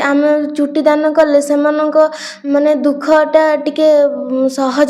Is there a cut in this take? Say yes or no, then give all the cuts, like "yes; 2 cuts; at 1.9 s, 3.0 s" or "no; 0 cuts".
no; 0 cuts